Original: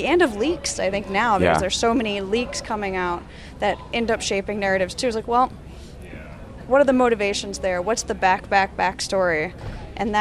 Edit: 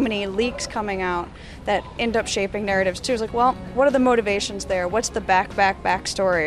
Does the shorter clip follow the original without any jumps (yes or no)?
no